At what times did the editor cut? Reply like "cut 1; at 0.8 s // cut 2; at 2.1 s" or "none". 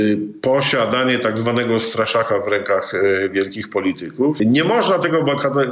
cut 1; at 4.4 s